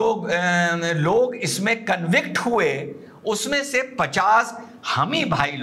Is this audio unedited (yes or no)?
yes